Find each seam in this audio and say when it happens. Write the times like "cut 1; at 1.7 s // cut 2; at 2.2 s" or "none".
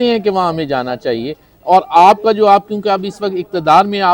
none

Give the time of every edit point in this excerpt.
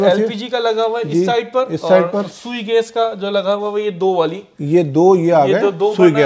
none

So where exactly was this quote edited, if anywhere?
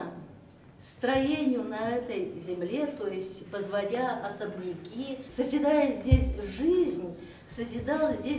cut 1; at 5.2 s

